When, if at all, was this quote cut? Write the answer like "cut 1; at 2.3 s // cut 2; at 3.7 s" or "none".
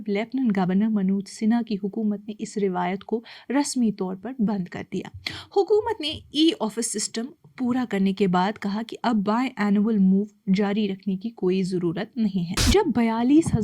cut 1; at 12.6 s

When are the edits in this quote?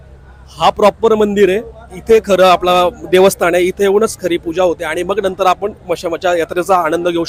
none

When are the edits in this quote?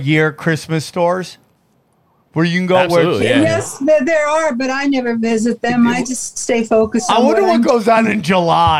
none

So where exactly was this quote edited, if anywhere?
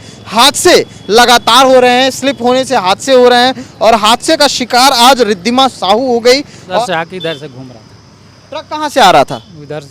cut 1; at 6.8 s

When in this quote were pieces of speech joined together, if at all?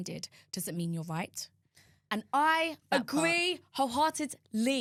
none

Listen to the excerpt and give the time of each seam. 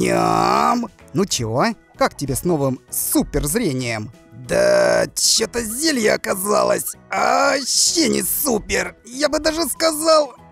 cut 1; at 1.0 s

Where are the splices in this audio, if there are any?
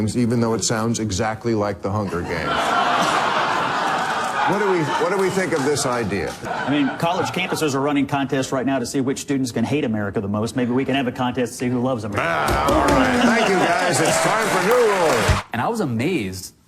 cut 1; at 6.4 s // cut 2; at 15.3 s

